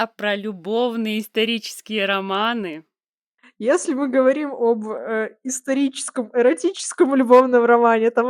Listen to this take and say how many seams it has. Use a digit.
1